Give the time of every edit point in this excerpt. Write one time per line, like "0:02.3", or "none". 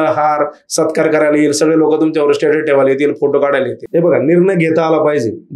0:03.8